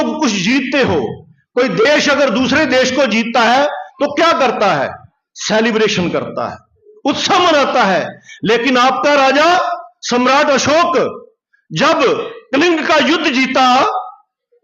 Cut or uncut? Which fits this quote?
uncut